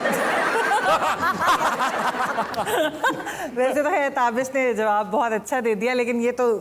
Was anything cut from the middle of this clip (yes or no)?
no